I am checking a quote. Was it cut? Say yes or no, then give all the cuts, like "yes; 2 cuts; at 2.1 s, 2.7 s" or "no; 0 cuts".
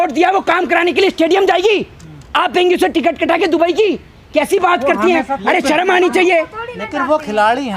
no; 0 cuts